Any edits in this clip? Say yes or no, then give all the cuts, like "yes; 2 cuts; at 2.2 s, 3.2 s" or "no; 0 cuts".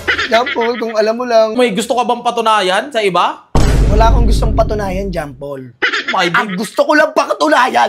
yes; 1 cut; at 1.6 s